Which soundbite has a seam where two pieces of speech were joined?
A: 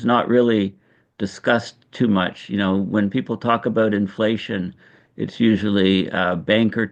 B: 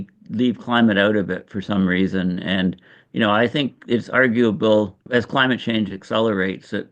B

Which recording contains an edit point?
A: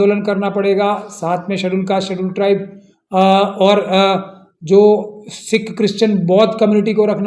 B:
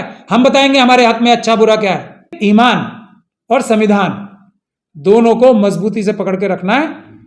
B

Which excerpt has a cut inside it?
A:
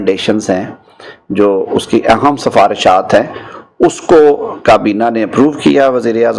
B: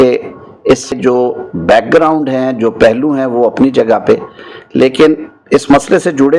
B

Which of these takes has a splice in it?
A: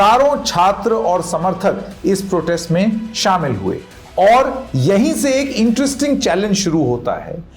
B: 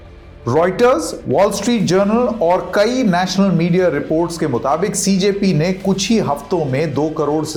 A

